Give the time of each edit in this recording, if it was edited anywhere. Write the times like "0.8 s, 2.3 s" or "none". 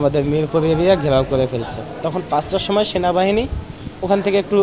1.9 s

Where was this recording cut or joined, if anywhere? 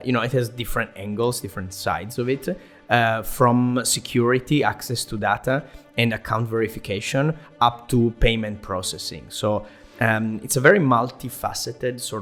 none

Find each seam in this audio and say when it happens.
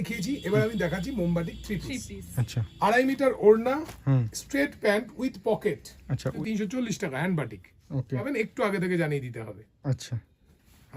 6.3 s, 8.2 s

